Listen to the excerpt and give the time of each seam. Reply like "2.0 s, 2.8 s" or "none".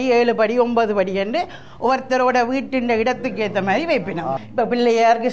4.4 s